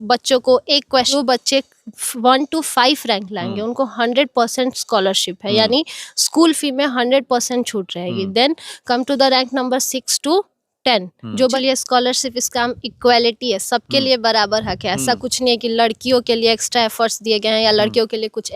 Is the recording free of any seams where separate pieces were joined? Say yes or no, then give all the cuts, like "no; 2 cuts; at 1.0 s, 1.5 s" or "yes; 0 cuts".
no; 2 cuts; at 1.1 s, 11.6 s